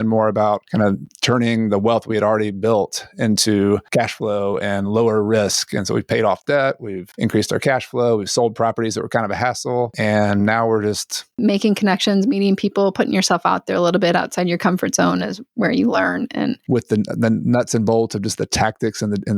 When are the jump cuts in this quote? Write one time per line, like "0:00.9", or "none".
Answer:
0:11.3
0:16.6